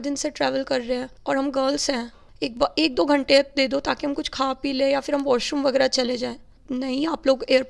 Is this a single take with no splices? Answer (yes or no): no